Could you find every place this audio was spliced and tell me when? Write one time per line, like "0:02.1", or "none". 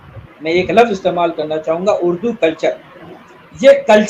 none